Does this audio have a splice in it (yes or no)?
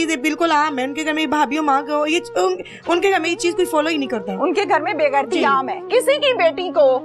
yes